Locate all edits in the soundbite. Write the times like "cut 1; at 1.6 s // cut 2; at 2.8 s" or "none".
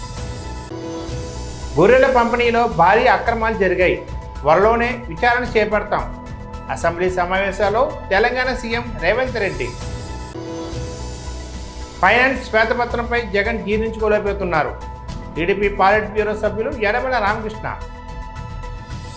cut 1; at 17.8 s